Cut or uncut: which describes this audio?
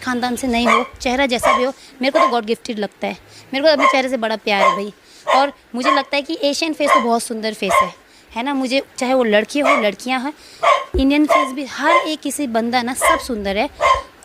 uncut